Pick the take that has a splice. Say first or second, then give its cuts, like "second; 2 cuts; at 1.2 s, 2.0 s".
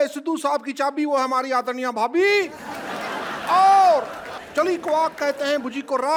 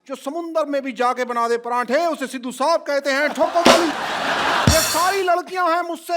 second; 1 cut; at 4.7 s